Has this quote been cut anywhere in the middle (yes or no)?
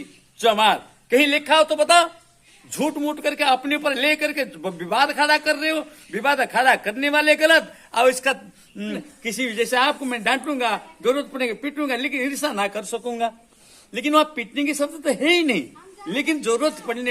yes